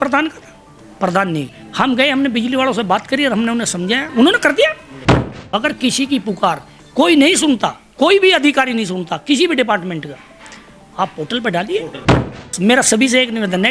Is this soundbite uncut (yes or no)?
no